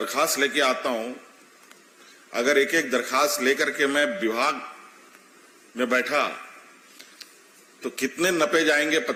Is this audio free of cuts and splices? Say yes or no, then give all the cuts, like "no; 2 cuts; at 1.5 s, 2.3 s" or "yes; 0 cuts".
yes; 0 cuts